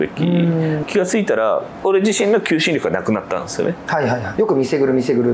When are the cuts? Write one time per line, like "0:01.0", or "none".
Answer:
0:00.8
0:01.8
0:04.3